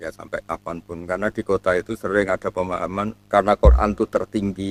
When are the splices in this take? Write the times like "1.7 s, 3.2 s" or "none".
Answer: 3.2 s